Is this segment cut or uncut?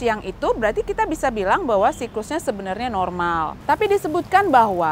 cut